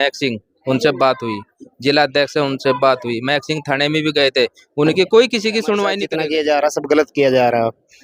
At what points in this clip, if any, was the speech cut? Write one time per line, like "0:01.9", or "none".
0:06.1